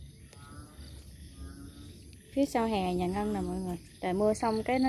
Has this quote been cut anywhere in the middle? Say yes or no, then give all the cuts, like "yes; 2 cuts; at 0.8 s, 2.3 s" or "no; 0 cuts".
yes; 2 cuts; at 1.0 s, 3.8 s